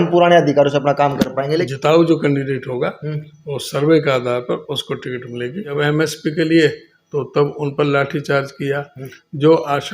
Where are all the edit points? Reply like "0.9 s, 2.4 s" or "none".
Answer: 1.7 s, 5.7 s

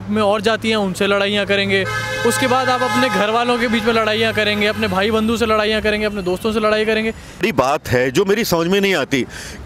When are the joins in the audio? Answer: 7.4 s

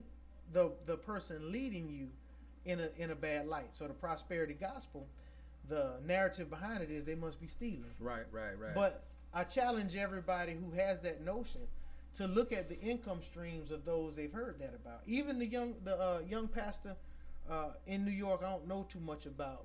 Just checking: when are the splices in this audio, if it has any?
none

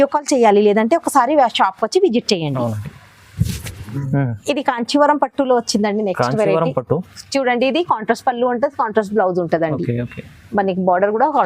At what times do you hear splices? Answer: 3.9 s

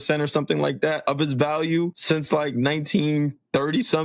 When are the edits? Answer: 1.0 s, 2.0 s

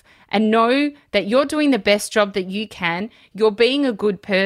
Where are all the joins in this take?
3.2 s

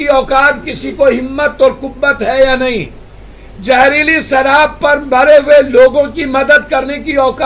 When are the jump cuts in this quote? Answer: none

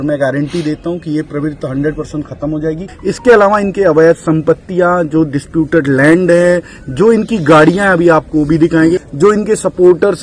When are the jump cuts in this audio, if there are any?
2.9 s, 9.0 s

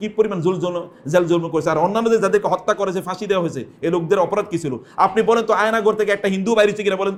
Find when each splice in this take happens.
none

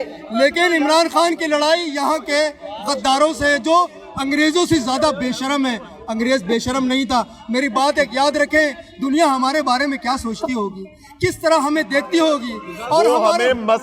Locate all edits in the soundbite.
none

